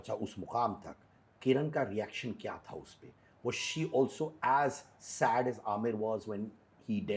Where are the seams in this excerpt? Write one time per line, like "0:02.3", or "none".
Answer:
none